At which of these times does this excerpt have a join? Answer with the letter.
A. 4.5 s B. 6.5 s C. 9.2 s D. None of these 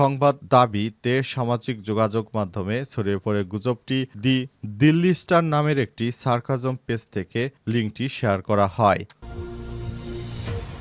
C